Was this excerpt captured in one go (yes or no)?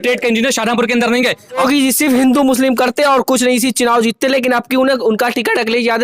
no